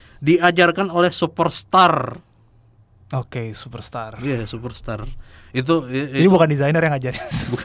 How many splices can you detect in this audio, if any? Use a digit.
0